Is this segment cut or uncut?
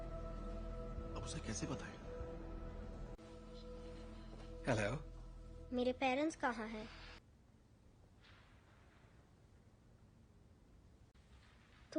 cut